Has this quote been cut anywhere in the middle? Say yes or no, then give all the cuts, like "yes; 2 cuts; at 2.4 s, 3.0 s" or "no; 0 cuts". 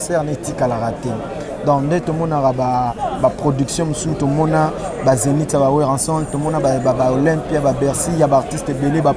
no; 0 cuts